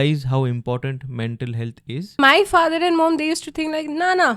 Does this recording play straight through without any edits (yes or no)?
no